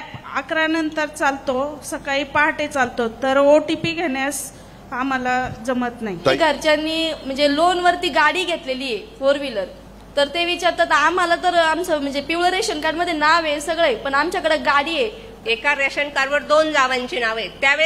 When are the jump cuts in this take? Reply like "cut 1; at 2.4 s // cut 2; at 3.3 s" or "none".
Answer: cut 1; at 6.4 s // cut 2; at 15.3 s